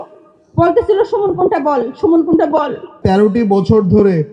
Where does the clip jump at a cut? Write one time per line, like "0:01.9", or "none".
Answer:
0:03.0